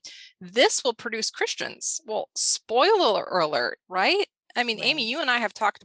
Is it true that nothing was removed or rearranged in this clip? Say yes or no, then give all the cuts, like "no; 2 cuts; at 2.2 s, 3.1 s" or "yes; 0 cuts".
yes; 0 cuts